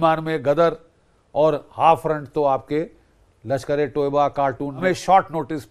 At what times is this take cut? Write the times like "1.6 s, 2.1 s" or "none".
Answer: 4.8 s